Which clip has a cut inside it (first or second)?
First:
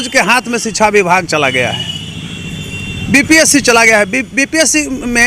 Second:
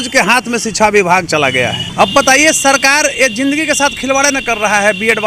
second